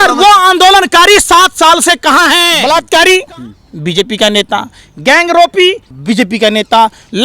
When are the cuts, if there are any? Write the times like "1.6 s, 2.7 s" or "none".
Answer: 2.5 s, 5.9 s